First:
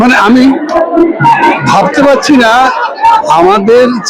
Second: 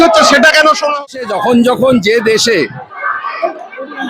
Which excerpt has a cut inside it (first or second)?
second